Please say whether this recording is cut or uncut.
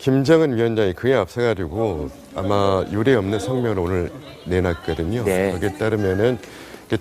cut